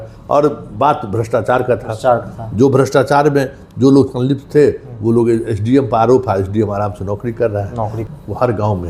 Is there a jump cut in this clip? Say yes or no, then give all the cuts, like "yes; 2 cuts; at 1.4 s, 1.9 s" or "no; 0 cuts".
yes; 1 cut; at 8.0 s